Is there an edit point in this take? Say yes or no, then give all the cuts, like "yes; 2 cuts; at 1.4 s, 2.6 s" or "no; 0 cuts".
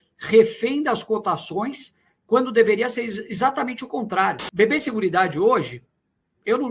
yes; 1 cut; at 4.4 s